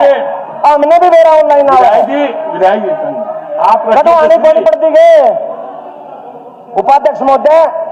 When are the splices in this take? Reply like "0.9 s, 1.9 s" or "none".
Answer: none